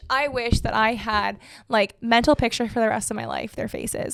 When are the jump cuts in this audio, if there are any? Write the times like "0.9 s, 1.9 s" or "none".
none